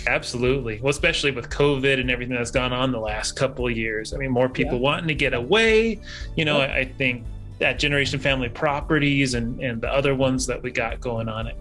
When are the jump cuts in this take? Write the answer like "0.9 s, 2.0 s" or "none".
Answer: none

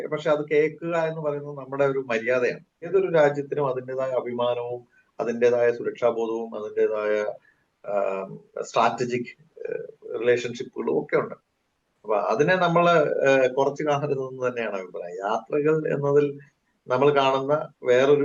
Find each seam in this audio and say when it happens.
2.9 s

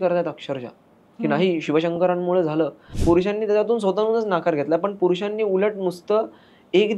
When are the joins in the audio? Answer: 2.9 s

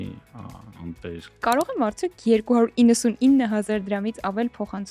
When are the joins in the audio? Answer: 1.4 s

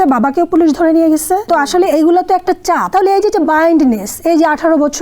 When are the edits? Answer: 1.4 s, 2.8 s

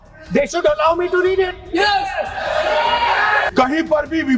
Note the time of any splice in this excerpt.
3.5 s

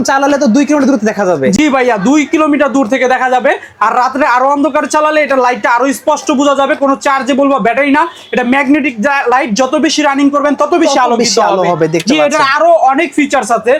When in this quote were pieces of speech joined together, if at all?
none

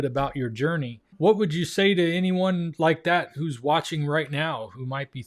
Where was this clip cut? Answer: 1.0 s

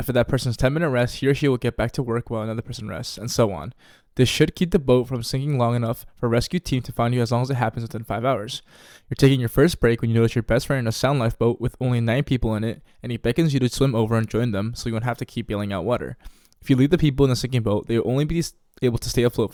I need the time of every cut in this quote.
none

